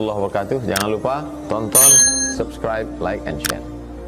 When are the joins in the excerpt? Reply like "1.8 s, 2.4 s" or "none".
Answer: none